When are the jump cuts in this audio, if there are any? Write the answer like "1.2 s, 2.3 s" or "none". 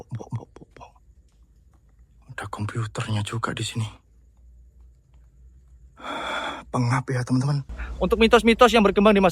7.8 s